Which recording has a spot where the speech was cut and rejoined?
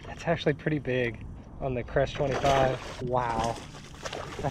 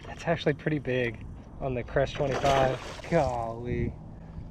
first; 1 cut; at 2.9 s

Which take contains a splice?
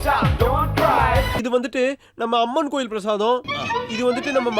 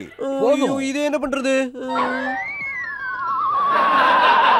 first; 1 cut; at 1.4 s

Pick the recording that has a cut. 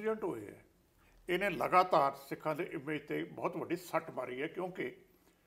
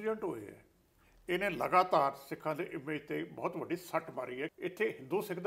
second; 1 cut; at 4.5 s

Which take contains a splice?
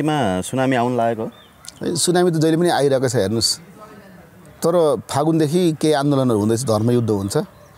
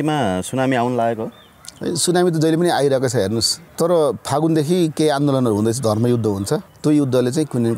second; 2 cuts; at 3.6 s, 6.7 s

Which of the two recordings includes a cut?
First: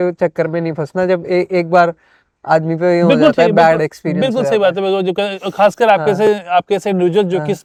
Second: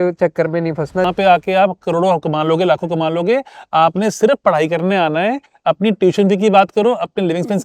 second; 1 cut; at 1.1 s

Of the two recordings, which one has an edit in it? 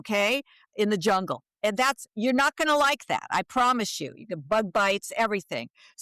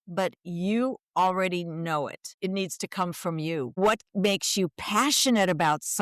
second; 2 cuts; at 2.2 s, 3.8 s

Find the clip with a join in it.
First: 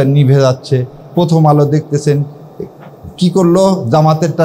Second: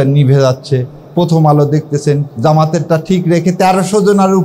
second; 1 cut; at 2.3 s

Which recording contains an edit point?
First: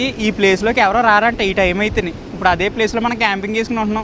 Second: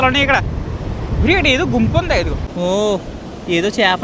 second; 1 cut; at 2.4 s

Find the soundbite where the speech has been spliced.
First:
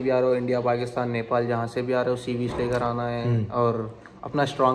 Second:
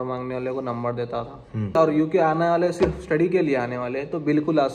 second; 1 cut; at 1.8 s

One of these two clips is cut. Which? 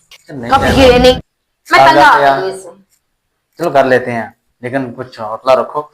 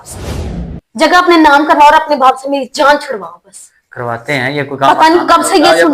first; 1 cut; at 1.2 s

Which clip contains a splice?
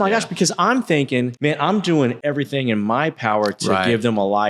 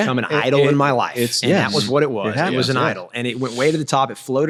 first; 2 cuts; at 1.3 s, 2.2 s

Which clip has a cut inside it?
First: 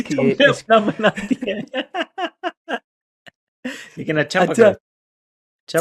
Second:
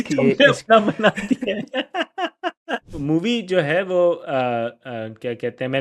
second; 1 cut; at 2.9 s

